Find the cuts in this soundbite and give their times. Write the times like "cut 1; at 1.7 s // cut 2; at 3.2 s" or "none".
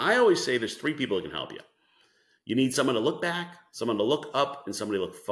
none